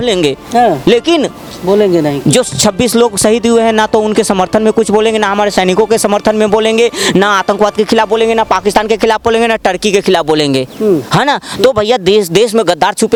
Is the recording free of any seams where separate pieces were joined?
yes; 0 cuts

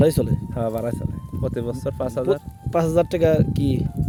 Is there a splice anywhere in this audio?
no; 0 cuts

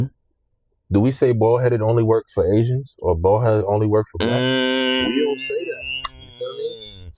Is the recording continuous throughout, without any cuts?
yes; 0 cuts

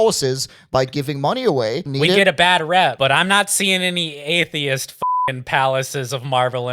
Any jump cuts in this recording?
yes; 2 cuts; at 1.9 s, 2.9 s

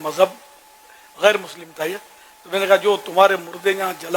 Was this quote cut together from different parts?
no; 0 cuts

